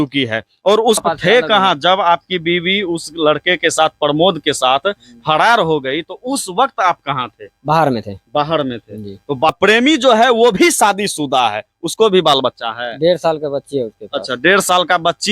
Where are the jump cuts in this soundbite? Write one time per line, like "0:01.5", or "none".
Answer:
0:01.0
0:09.5